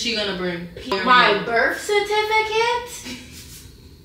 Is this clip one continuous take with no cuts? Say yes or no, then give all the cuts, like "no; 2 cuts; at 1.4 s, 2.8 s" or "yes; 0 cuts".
no; 1 cut; at 0.9 s